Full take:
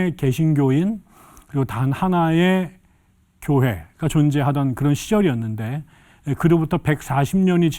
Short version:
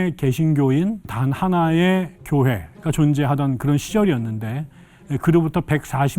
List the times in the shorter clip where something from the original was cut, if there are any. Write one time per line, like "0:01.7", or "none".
0:01.1
0:02.2